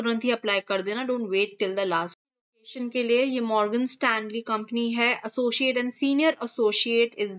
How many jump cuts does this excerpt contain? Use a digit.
1